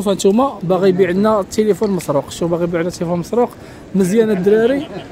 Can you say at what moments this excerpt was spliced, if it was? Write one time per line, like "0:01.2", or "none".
none